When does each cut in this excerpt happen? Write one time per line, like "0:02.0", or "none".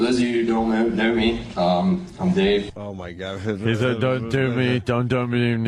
0:02.8